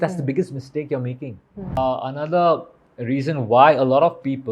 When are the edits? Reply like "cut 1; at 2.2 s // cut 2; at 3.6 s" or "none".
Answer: cut 1; at 1.8 s